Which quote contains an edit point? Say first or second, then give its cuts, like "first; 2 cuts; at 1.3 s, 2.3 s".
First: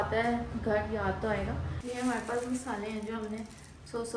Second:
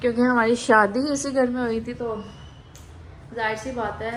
first; 1 cut; at 1.7 s